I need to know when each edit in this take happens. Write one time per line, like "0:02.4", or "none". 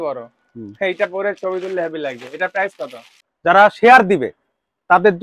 0:03.2